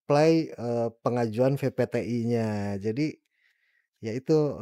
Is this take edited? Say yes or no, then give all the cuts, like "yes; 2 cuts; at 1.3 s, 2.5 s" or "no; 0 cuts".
no; 0 cuts